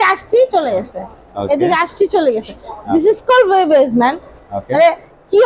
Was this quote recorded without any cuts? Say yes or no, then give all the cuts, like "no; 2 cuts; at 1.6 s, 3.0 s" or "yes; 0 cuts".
yes; 0 cuts